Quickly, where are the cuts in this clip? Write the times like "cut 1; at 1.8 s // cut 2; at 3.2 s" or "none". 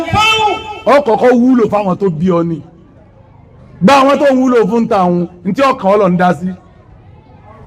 none